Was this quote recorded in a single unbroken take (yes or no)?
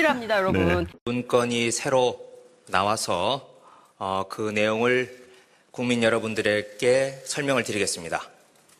yes